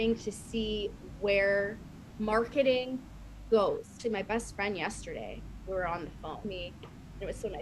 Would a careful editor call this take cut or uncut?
cut